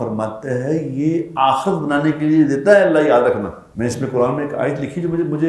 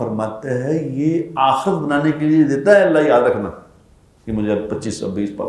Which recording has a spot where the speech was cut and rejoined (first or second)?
first